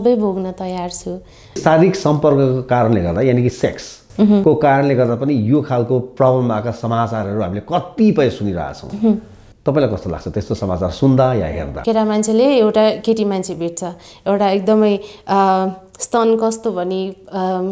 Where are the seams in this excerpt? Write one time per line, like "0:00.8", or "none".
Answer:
0:01.6
0:11.7